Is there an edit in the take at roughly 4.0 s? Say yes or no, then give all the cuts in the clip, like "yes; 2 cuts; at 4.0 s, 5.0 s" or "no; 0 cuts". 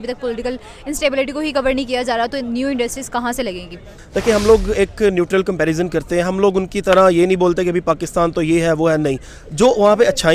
yes; 1 cut; at 4.0 s